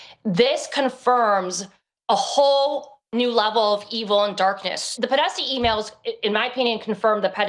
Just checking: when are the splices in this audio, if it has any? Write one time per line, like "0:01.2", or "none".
0:04.9